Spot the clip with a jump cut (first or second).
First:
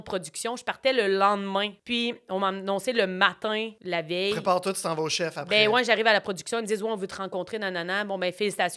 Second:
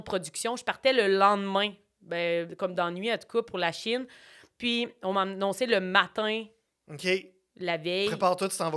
first